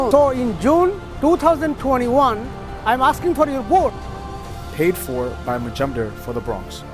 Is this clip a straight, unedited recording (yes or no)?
yes